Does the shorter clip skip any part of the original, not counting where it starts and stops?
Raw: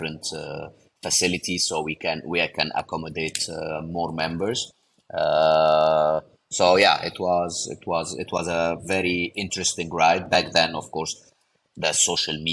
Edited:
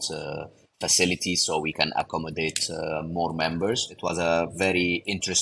yes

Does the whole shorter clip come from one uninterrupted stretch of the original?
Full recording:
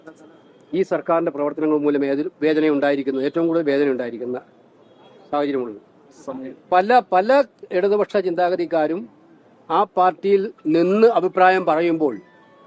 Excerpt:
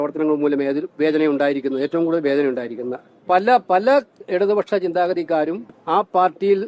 no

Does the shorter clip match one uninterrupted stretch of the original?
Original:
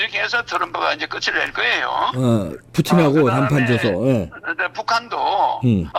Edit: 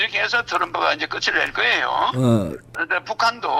no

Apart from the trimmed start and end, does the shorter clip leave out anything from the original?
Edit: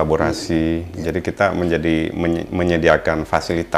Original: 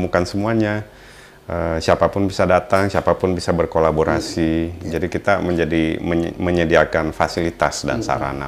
no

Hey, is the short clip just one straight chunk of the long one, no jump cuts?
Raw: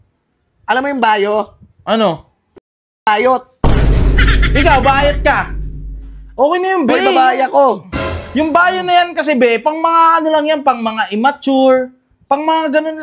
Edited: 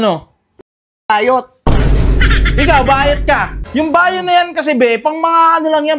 no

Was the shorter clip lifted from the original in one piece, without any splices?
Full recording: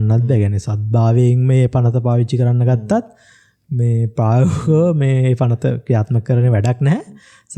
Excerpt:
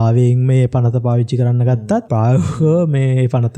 no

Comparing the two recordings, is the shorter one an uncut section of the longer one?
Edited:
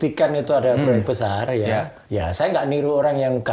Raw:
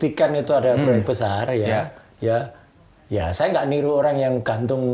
no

